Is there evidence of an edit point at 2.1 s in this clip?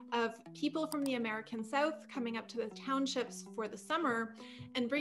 no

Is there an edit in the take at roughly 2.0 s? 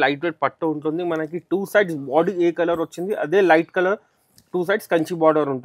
no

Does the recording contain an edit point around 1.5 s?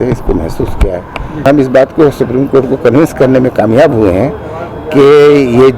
yes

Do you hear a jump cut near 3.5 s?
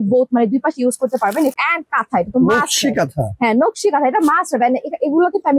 no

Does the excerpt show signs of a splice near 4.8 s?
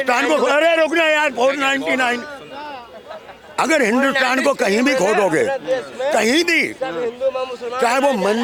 no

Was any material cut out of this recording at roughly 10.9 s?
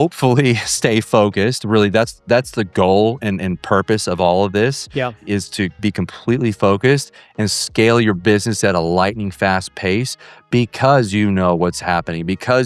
no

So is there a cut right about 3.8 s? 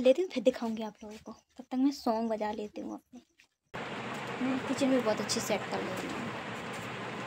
yes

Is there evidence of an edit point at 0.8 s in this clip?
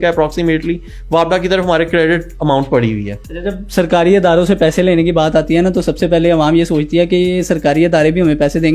no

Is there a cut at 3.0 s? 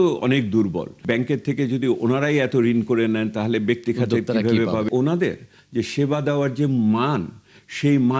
no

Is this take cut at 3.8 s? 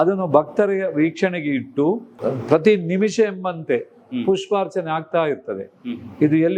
no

